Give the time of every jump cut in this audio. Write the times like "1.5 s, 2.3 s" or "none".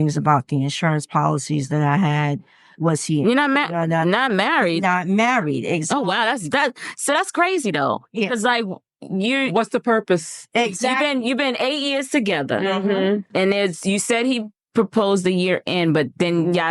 none